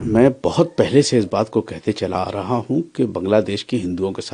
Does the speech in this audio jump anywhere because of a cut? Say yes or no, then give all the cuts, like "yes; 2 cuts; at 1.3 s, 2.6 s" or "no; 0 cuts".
no; 0 cuts